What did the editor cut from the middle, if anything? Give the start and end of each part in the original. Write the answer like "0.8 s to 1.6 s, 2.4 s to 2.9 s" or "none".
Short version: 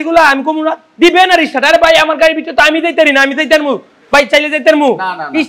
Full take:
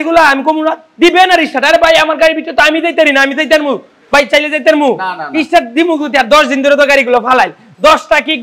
none